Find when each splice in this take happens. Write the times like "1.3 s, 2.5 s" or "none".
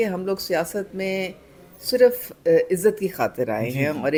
none